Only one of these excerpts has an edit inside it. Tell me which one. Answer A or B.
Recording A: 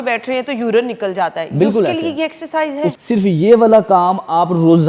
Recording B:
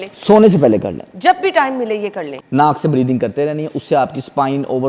A